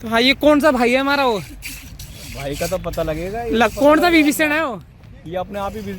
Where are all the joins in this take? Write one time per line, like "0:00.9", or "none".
none